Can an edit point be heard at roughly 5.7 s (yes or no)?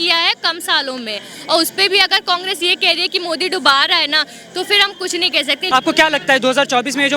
yes